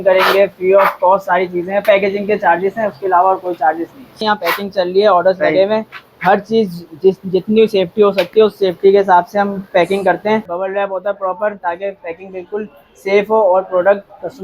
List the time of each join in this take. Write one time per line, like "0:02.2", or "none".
0:01.8
0:10.5